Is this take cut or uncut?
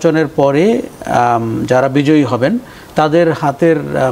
uncut